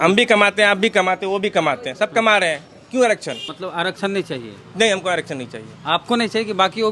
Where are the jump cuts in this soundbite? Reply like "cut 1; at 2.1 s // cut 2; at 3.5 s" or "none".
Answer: cut 1; at 3.5 s